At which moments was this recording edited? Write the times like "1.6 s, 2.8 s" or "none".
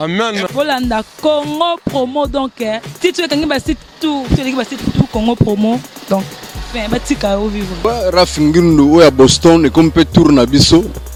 none